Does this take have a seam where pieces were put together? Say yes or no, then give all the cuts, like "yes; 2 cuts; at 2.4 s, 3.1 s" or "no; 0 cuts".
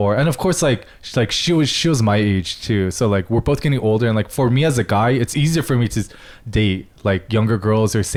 no; 0 cuts